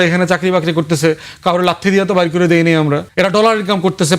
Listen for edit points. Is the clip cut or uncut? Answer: cut